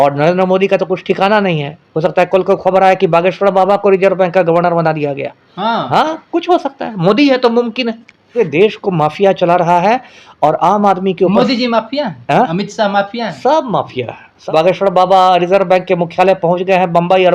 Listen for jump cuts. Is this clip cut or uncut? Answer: cut